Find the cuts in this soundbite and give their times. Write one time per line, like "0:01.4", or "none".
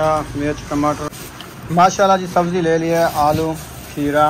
0:01.2